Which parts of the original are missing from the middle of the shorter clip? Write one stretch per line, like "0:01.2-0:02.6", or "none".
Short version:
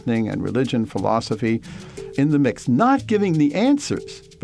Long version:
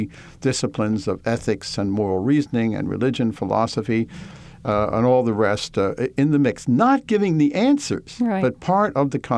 0:04.6-0:06.1